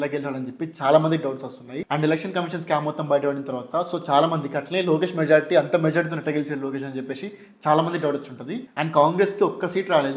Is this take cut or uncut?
uncut